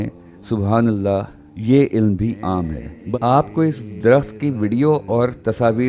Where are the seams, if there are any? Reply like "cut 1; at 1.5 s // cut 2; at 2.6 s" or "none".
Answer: cut 1; at 2.9 s